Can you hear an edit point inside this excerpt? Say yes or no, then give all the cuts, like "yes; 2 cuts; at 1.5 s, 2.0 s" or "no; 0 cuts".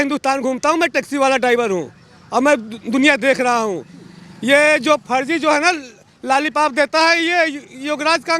no; 0 cuts